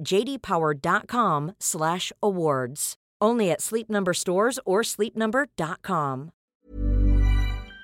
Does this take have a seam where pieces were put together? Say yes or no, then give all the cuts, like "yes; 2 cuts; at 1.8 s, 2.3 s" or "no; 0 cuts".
yes; 1 cut; at 6.5 s